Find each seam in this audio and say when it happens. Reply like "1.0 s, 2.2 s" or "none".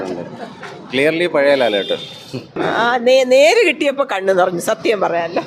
2.5 s